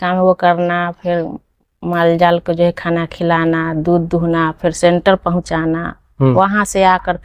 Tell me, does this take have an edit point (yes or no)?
no